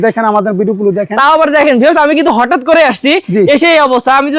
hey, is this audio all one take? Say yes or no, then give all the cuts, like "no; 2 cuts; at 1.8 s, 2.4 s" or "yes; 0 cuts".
yes; 0 cuts